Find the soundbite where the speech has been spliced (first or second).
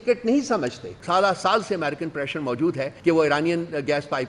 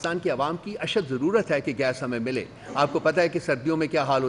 first